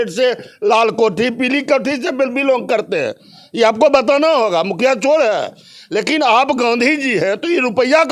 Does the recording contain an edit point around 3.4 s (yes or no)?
no